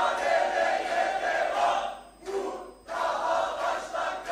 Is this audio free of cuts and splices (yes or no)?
yes